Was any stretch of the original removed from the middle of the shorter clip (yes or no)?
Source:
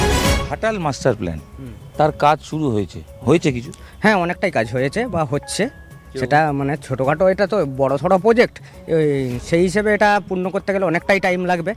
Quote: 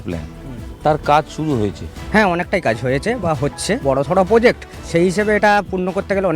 yes